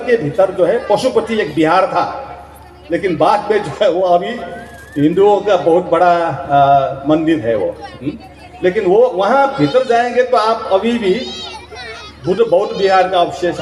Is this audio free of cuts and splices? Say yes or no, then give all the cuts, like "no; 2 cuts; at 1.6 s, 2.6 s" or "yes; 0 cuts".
yes; 0 cuts